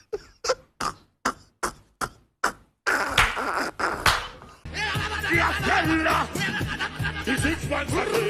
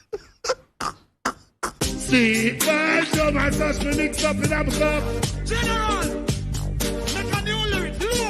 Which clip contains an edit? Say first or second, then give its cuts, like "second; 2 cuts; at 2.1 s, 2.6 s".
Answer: second; 1 cut; at 1.7 s